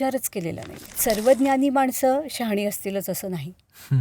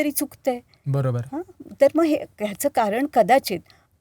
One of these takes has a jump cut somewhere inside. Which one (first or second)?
first